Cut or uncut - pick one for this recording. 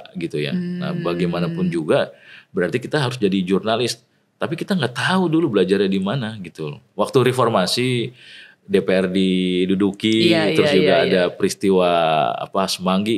uncut